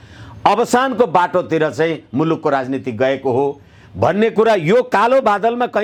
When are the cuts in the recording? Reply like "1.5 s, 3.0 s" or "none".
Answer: none

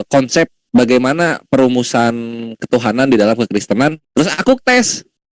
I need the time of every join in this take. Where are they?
4.0 s

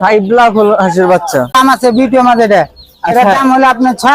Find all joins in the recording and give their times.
1.5 s

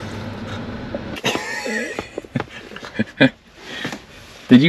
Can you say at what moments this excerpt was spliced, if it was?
1.2 s

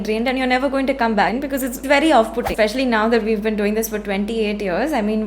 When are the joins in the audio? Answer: 1.4 s, 2.5 s

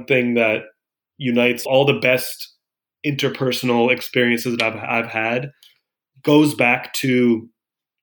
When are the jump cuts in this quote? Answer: 1.7 s

